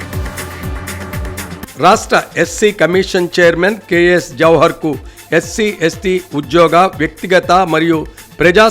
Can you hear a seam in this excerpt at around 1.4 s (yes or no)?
yes